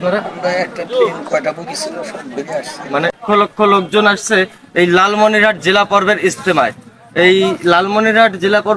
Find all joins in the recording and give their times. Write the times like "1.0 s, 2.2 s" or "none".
3.2 s